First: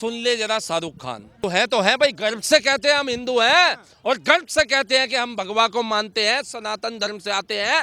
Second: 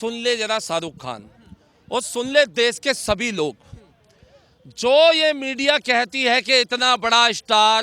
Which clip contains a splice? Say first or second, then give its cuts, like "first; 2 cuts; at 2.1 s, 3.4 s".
first; 1 cut; at 1.4 s